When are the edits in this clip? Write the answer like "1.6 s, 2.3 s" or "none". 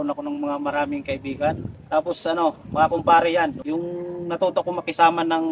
1.7 s, 3.6 s